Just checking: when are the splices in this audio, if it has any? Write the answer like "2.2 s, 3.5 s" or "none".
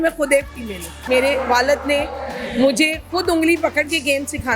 1.0 s